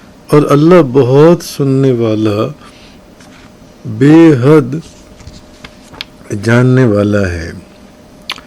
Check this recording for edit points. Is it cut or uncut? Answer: cut